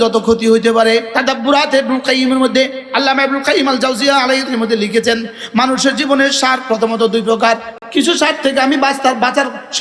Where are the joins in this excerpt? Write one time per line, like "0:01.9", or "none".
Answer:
0:01.1
0:04.4
0:07.7